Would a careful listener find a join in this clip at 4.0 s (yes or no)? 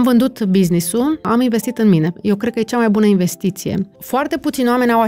yes